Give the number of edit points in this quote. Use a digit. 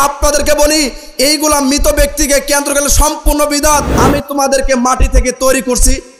1